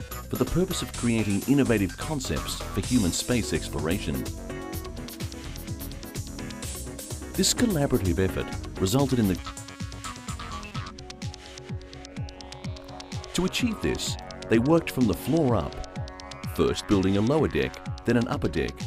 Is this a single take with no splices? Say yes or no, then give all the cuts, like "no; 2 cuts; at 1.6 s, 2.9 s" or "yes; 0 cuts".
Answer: yes; 0 cuts